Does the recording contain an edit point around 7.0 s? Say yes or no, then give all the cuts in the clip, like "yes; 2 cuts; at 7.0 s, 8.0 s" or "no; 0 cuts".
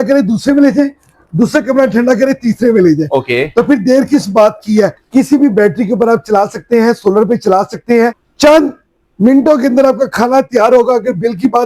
no; 2 cuts; at 5.0 s, 8.3 s